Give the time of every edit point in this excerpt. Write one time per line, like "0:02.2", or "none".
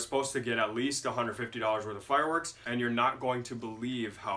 0:02.6

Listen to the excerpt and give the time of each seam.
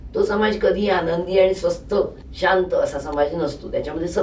0:02.2

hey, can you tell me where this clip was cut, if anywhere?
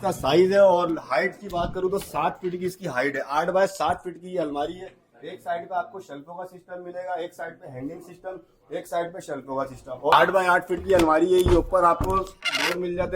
0:10.1

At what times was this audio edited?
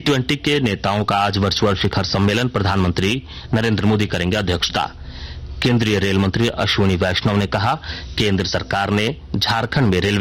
none

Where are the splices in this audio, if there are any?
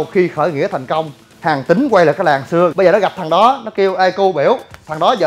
0:01.3
0:02.7

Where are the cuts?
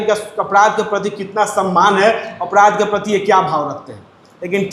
none

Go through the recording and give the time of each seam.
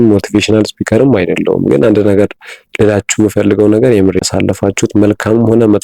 0:04.2

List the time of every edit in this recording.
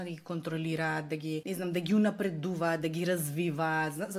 0:01.4

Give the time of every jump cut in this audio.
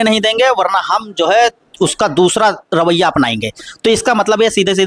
none

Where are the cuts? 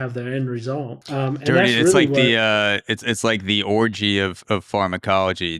0:01.0

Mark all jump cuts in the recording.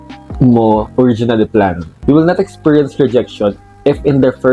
0:01.9

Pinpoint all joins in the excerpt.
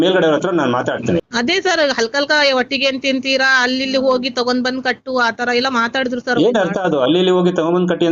0:01.3

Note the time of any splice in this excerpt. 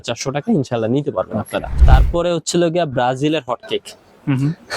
0:01.7

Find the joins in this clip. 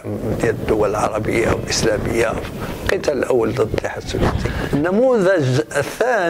0:04.5

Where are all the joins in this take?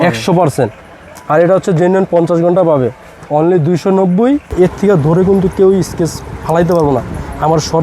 0:04.5

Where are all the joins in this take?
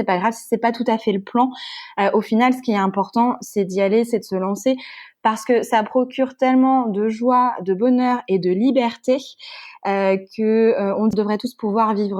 0:11.1

